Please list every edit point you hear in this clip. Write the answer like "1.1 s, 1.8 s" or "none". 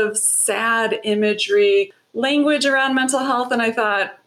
2.0 s